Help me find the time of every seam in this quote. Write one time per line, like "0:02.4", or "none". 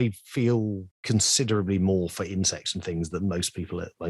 0:00.9